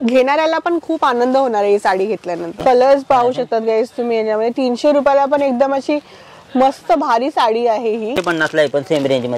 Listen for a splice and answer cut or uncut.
cut